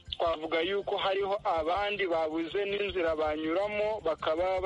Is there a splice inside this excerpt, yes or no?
no